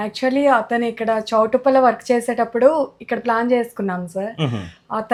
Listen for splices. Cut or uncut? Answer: uncut